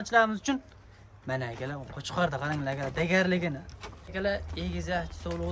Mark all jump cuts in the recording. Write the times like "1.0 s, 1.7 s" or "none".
4.1 s